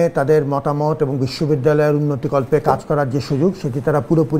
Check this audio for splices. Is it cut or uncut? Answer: uncut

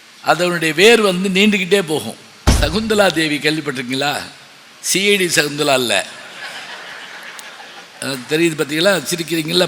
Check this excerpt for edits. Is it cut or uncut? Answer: cut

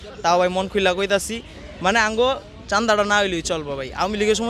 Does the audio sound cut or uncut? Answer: uncut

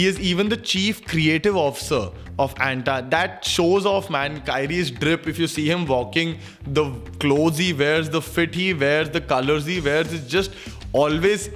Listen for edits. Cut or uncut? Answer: uncut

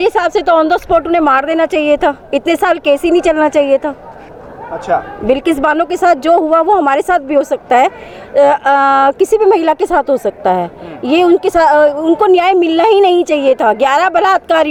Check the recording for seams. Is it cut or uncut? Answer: uncut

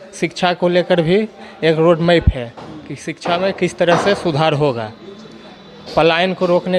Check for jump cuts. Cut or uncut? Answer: uncut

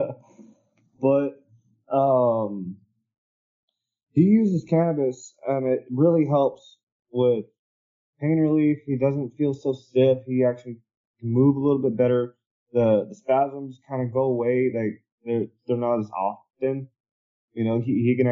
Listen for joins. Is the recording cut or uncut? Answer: uncut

